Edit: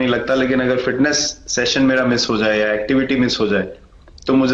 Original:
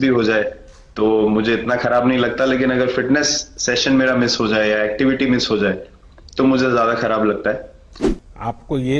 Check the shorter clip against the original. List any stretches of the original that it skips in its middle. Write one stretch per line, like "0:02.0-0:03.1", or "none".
none